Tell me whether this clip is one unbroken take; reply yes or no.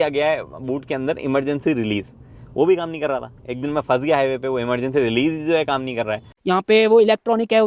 yes